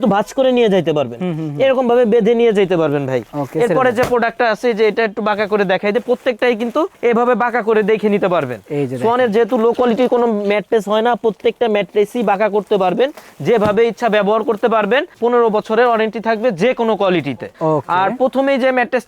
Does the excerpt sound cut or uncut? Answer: uncut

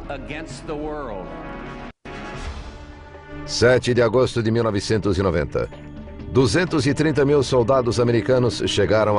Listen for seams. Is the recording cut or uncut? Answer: cut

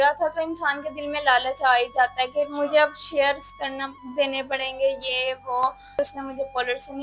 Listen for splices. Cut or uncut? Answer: cut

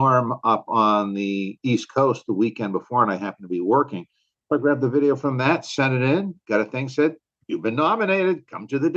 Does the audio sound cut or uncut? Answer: uncut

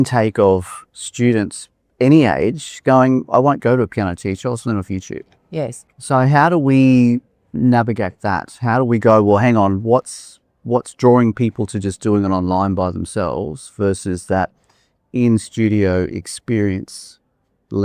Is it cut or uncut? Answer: uncut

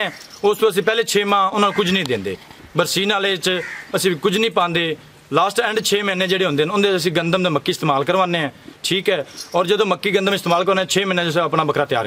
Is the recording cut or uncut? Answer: uncut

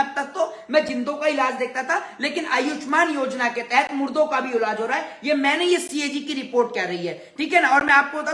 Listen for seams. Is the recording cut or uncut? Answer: uncut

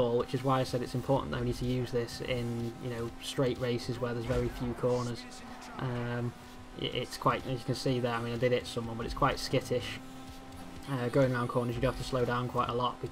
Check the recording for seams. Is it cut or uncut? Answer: cut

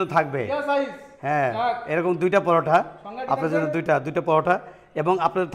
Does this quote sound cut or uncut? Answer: uncut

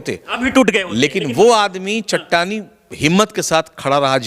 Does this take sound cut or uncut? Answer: uncut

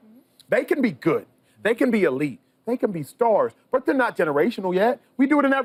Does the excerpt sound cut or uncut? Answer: uncut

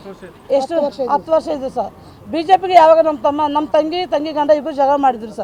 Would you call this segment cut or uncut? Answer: uncut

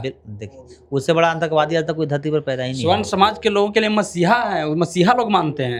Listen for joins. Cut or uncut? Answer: uncut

